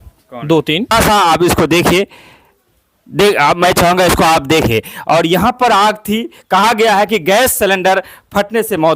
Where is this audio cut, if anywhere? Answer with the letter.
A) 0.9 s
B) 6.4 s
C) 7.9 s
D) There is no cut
A